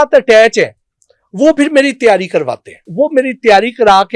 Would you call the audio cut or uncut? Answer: cut